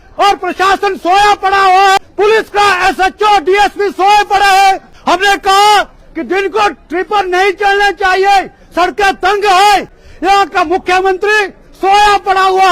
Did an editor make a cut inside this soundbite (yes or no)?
yes